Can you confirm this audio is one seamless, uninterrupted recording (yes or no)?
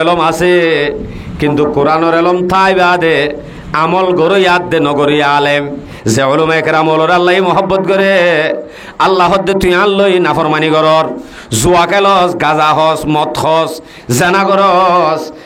no